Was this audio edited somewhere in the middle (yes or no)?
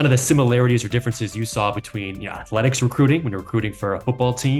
no